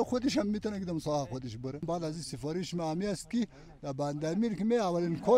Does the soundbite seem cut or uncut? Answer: cut